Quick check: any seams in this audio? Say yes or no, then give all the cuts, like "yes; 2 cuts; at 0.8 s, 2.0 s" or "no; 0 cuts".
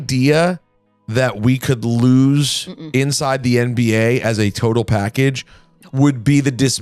no; 0 cuts